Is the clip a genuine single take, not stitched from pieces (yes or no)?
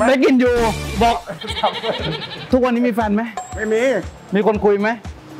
yes